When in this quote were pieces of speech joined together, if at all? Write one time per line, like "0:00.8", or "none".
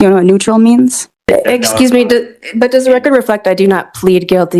0:01.2